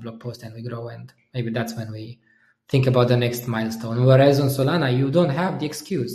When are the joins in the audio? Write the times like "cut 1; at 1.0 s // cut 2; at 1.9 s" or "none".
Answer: none